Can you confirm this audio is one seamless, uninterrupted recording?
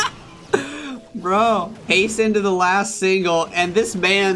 no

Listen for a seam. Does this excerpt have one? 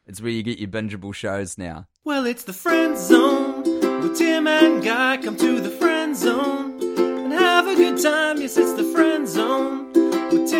no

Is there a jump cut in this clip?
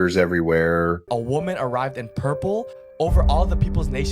yes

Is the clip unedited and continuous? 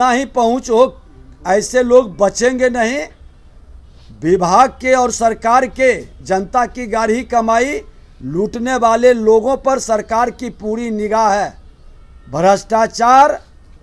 yes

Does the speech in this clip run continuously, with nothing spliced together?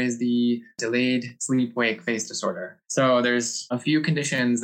no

